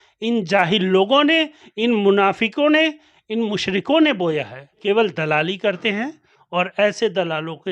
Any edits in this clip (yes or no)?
yes